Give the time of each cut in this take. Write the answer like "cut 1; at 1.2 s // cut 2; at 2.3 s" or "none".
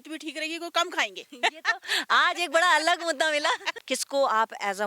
cut 1; at 3.7 s

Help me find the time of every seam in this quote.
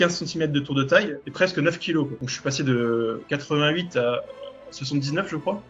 none

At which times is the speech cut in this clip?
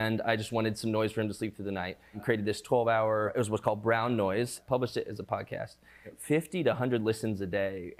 cut 1; at 2.2 s // cut 2; at 3.3 s // cut 3; at 4.6 s // cut 4; at 6.1 s

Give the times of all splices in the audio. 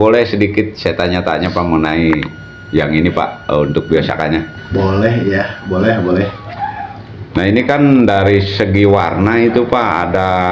none

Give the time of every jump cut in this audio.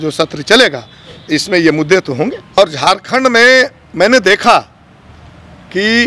cut 1; at 2.6 s

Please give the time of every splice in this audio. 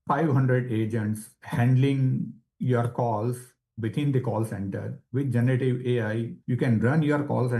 cut 1; at 6.4 s

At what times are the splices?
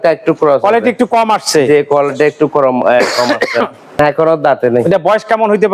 cut 1; at 4.0 s

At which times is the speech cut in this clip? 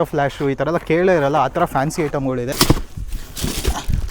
cut 1; at 2.5 s

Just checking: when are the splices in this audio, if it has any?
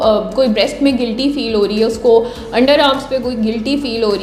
none

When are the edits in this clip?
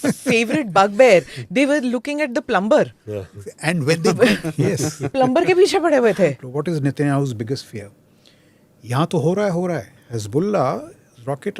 cut 1; at 6.4 s

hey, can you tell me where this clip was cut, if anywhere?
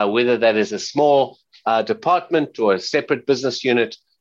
none

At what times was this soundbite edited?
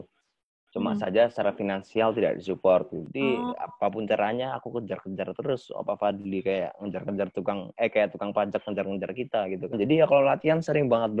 cut 1; at 3.0 s // cut 2; at 9.7 s

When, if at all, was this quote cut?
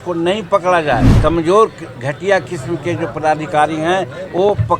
cut 1; at 1.1 s

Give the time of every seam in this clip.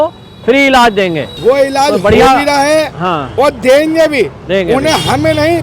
cut 1; at 1.3 s

